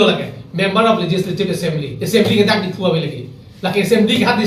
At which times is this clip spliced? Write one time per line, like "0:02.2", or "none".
none